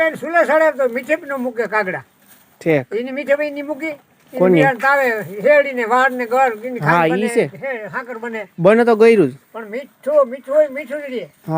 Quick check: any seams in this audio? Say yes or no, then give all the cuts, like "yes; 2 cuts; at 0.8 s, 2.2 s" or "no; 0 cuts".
no; 0 cuts